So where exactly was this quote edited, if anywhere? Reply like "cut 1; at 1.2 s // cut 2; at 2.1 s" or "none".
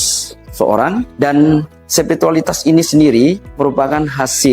cut 1; at 1.1 s // cut 2; at 1.8 s // cut 3; at 3.5 s